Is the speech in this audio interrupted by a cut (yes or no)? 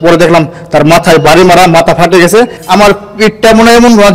yes